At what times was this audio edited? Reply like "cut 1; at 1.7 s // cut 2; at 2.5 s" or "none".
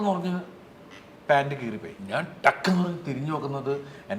cut 1; at 1.9 s